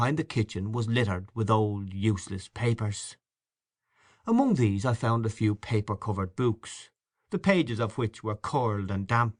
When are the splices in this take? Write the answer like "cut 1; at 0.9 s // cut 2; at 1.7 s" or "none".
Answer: none